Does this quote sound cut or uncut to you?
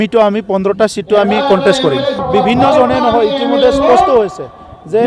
cut